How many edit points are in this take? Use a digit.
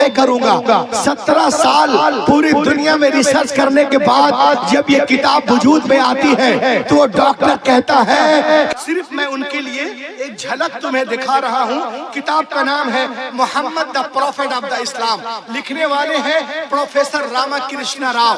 1